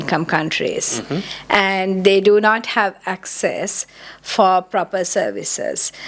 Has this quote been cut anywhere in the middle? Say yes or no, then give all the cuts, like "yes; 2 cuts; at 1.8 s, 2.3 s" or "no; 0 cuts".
no; 0 cuts